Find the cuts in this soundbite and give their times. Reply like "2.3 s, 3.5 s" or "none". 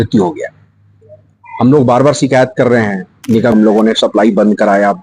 3.5 s